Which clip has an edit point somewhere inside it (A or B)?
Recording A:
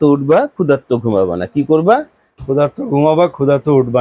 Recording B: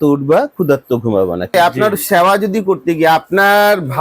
B